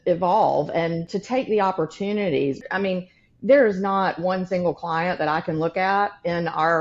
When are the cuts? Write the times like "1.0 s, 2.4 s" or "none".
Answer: 1.1 s, 2.6 s